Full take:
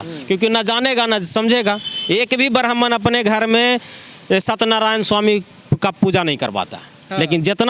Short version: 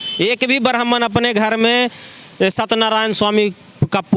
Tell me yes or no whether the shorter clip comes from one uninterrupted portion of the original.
yes